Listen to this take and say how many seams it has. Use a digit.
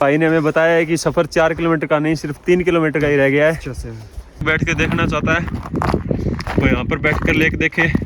1